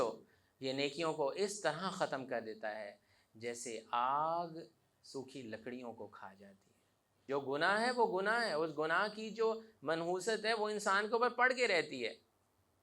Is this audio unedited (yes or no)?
no